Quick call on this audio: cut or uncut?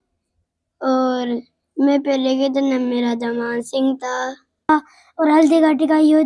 cut